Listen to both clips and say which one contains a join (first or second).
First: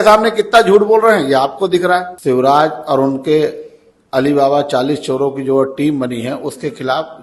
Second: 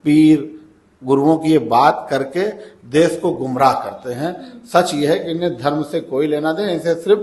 first